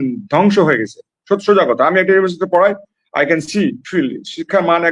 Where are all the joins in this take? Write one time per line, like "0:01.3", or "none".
none